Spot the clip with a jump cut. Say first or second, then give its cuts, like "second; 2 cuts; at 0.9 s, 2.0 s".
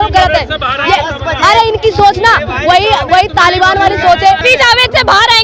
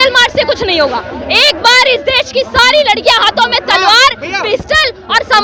first; 1 cut; at 4.4 s